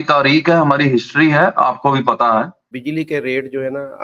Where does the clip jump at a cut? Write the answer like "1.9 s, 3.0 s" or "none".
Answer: 2.6 s

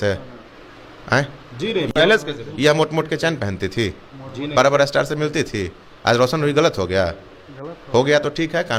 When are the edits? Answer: none

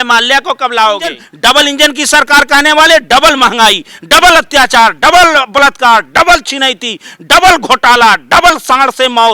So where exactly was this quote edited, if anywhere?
1.3 s

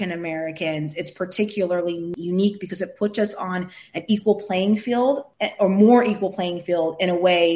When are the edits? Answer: 2.1 s

